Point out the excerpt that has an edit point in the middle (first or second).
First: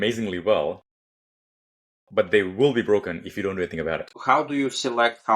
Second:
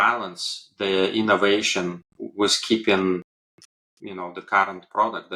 first